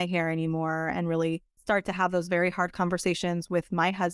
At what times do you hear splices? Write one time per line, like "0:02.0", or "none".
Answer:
0:01.5